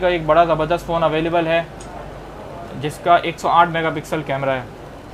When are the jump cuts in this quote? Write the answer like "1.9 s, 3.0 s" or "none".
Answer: none